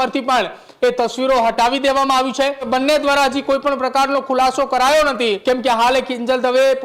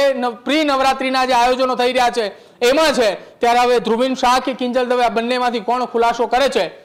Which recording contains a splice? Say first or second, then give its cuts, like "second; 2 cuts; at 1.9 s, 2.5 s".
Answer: first; 2 cuts; at 2.7 s, 5.4 s